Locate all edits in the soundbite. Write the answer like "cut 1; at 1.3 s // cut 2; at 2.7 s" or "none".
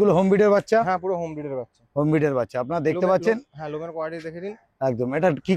none